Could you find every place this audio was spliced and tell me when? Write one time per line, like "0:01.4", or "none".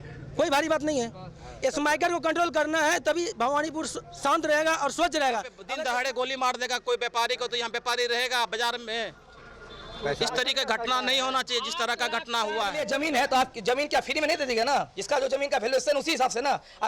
0:05.6
0:12.8